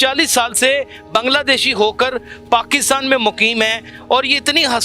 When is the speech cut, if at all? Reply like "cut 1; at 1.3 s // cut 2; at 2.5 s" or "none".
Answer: none